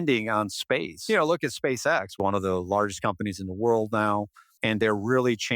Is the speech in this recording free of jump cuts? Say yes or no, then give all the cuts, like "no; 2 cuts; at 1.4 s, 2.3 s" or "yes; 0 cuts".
no; 3 cuts; at 0.9 s, 2.1 s, 4.5 s